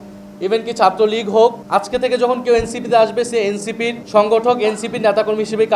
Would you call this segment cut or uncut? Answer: cut